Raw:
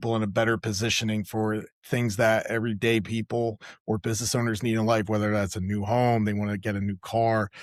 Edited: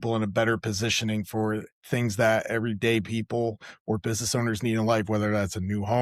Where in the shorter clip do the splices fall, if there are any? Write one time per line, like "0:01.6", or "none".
none